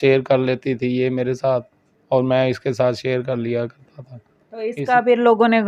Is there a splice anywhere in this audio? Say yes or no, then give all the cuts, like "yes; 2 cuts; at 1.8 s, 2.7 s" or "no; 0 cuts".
no; 0 cuts